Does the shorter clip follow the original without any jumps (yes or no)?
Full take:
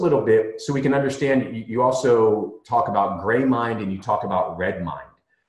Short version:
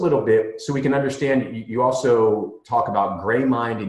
yes